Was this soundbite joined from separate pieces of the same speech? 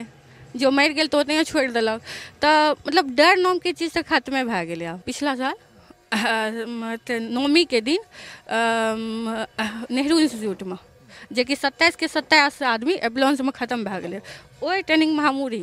yes; 1 cut; at 5.0 s

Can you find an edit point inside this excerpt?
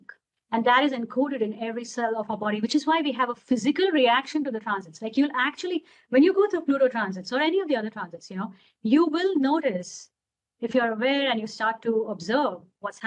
no; 0 cuts

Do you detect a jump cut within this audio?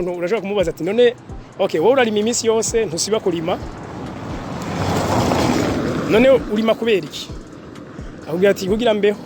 no; 0 cuts

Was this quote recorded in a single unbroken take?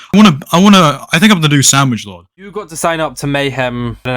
no; 1 cut; at 2.2 s

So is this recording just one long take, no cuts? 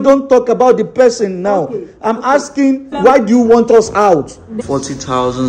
no; 2 cuts; at 3.0 s, 4.6 s

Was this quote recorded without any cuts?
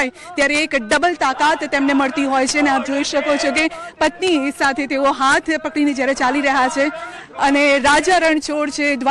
yes; 0 cuts

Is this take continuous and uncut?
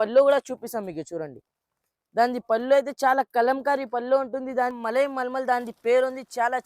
no; 1 cut; at 4.8 s

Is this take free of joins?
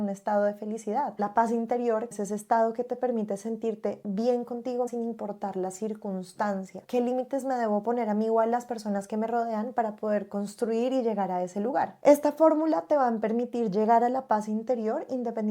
no; 6 cuts; at 1.2 s, 2.1 s, 4.9 s, 6.8 s, 11.9 s, 13.2 s

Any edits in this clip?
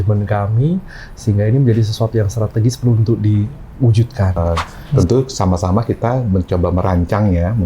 yes; 1 cut; at 4.4 s

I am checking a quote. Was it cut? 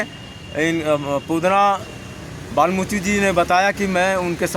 no; 0 cuts

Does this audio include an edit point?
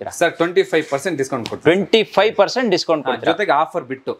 no; 0 cuts

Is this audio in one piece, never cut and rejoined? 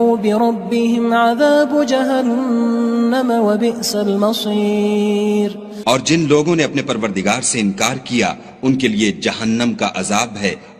yes; 0 cuts

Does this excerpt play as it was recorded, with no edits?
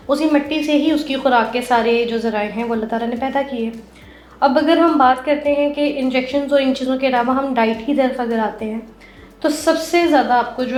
yes; 0 cuts

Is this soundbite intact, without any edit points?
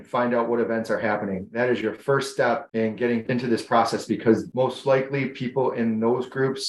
no; 2 cuts; at 3.2 s, 4.5 s

